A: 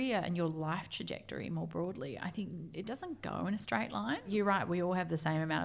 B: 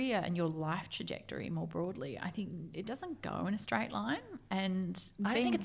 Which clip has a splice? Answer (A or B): A